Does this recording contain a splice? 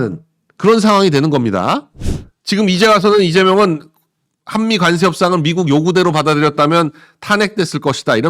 yes; 1 cut; at 1.9 s

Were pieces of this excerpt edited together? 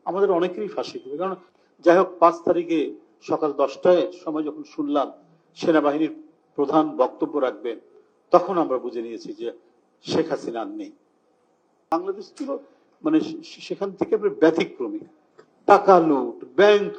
yes; 2 cuts; at 1.4 s, 11.9 s

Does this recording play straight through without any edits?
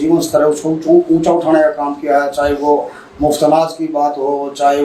yes; 0 cuts

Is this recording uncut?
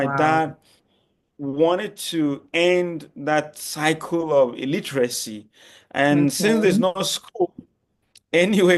yes; 0 cuts

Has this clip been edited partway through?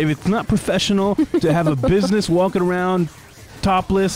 no; 0 cuts

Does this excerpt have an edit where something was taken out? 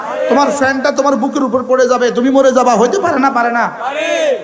no; 0 cuts

